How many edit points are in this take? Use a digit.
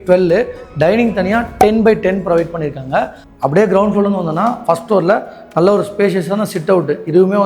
1